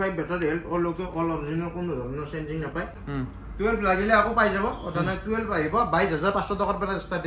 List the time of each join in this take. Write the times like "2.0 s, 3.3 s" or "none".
2.9 s